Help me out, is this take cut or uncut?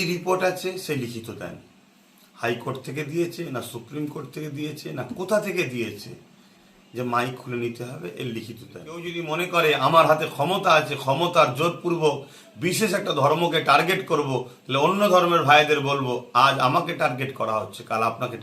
cut